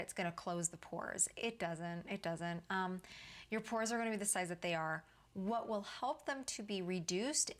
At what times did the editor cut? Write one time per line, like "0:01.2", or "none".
none